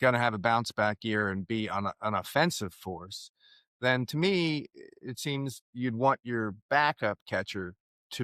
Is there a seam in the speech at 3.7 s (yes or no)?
no